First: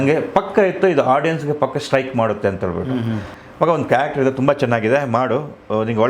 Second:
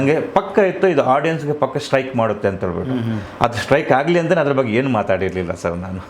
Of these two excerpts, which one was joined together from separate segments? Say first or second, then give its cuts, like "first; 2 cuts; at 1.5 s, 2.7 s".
first; 1 cut; at 3.3 s